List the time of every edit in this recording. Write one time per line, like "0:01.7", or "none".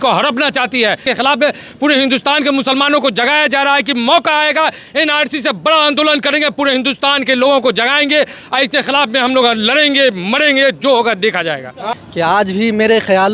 0:01.0
0:11.8